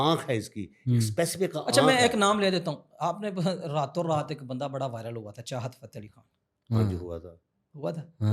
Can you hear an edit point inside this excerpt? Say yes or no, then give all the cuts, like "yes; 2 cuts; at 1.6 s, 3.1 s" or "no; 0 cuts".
no; 0 cuts